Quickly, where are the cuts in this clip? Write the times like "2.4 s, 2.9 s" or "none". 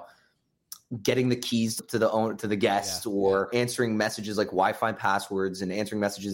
1.8 s, 3.5 s